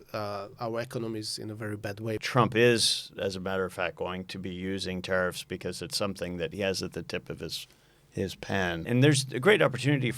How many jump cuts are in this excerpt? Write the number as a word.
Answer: two